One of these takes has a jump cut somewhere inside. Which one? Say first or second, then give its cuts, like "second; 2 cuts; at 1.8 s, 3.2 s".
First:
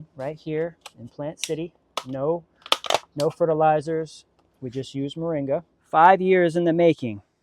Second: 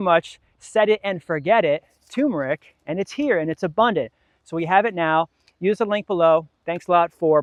first; 1 cut; at 5.8 s